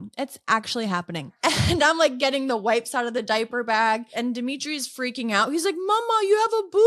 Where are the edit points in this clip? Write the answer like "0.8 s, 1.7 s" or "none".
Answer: 1.3 s, 4.1 s